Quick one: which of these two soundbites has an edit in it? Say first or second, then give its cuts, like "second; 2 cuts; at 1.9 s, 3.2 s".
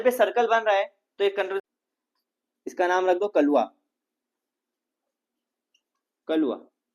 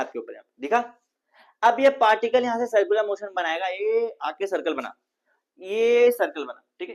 first; 1 cut; at 1.6 s